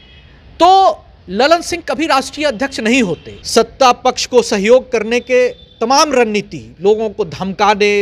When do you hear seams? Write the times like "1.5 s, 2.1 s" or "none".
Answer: 3.3 s